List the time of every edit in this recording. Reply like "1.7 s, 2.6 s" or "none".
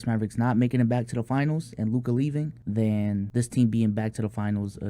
2.9 s